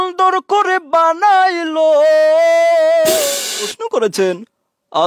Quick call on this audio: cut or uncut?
cut